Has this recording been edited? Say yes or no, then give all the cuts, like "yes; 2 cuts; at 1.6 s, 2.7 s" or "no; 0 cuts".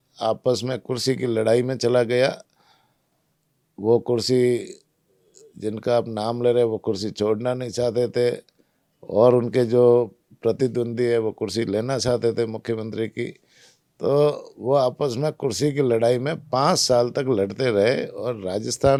no; 0 cuts